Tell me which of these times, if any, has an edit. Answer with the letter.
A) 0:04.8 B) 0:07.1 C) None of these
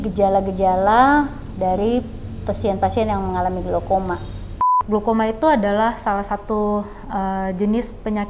A